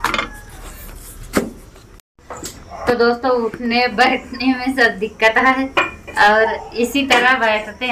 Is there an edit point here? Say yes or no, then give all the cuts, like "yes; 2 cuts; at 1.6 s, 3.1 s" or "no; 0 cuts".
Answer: no; 0 cuts